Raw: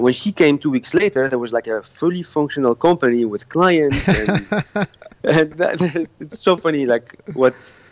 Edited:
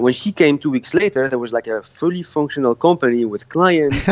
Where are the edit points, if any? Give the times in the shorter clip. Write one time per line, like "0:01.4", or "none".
none